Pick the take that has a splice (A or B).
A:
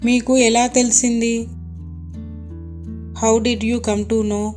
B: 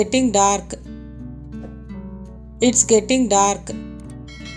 B